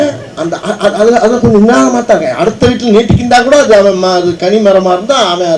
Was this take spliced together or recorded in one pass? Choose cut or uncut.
uncut